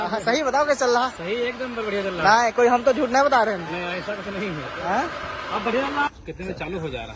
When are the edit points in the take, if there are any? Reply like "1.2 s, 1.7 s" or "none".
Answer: 6.1 s